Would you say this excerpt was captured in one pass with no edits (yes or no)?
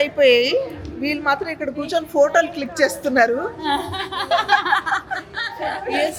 yes